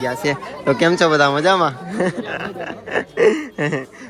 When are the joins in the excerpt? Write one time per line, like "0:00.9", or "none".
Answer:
none